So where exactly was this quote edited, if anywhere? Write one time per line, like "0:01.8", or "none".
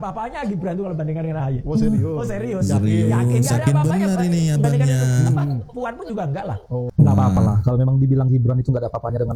none